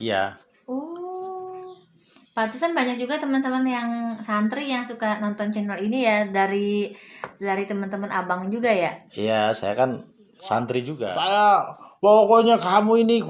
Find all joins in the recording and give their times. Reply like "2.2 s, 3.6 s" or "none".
11.0 s